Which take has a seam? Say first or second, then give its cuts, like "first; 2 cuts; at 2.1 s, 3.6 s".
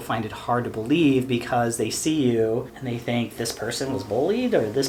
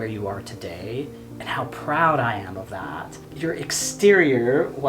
second; 2 cuts; at 1.3 s, 3.2 s